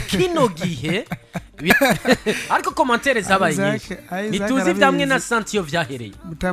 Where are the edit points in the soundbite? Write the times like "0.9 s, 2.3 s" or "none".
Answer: 1.7 s

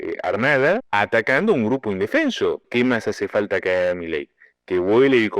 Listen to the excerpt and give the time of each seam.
0.9 s, 2.7 s

